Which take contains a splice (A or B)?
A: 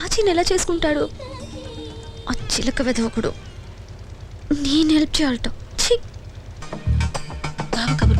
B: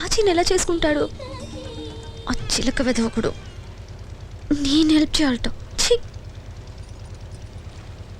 A